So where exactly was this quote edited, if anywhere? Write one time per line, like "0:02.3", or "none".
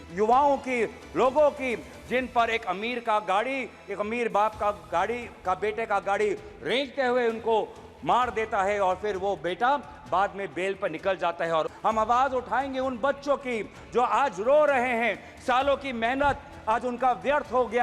0:11.7